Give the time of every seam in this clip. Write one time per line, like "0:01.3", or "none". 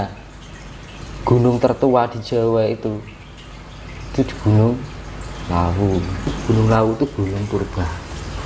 0:06.4